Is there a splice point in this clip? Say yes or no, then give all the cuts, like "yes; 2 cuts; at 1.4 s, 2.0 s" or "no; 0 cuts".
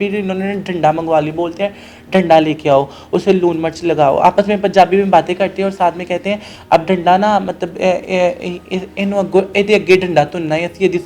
no; 0 cuts